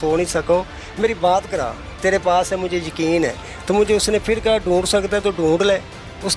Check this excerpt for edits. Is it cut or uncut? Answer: uncut